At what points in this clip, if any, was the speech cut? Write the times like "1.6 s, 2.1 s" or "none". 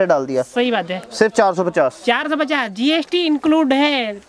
none